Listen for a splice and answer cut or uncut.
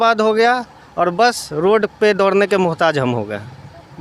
uncut